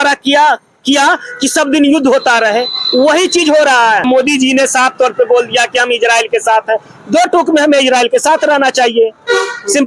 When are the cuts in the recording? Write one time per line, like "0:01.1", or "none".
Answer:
0:04.1